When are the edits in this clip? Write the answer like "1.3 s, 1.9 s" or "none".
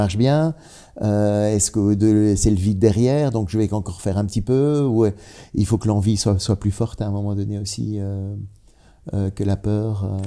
none